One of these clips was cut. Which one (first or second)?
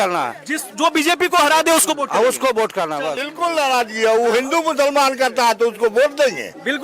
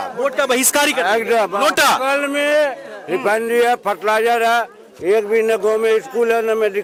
first